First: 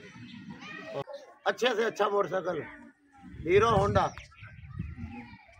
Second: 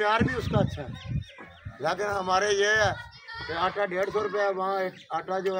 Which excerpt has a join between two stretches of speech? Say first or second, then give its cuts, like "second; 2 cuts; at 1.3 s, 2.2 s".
first; 1 cut; at 1.2 s